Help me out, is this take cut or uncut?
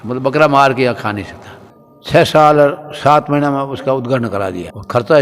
cut